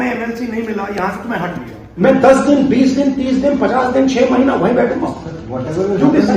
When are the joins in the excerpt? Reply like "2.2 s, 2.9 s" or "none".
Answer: 1.8 s

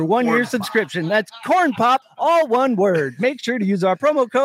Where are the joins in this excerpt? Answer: 2.1 s

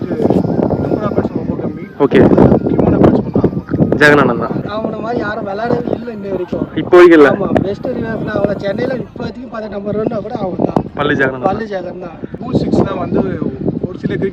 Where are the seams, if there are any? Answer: 4.6 s, 12.4 s

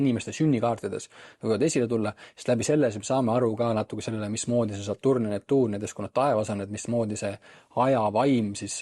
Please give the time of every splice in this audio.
none

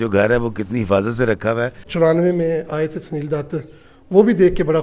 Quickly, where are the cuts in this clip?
1.8 s

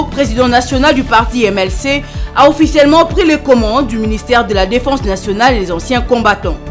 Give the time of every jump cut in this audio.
none

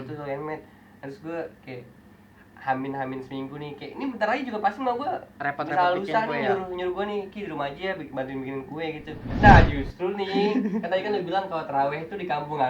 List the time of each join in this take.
9.3 s

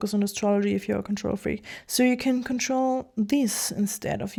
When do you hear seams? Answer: none

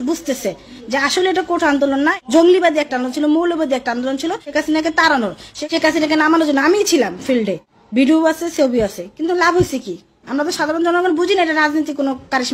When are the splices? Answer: none

